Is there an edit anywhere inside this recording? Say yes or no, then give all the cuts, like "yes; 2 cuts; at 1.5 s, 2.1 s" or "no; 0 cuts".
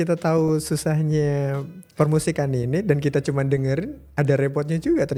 no; 0 cuts